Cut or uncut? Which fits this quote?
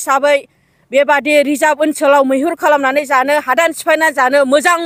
uncut